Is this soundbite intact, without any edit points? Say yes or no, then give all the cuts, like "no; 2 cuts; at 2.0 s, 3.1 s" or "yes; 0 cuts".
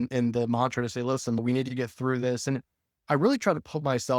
no; 1 cut; at 1.4 s